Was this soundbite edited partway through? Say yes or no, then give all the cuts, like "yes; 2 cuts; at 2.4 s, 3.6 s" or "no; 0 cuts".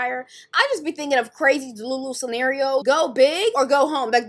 yes; 1 cut; at 2.8 s